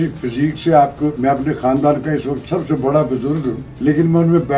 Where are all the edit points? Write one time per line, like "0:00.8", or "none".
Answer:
0:01.2
0:03.7